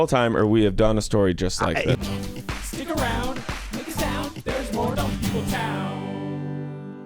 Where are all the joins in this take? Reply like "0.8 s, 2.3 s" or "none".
1.9 s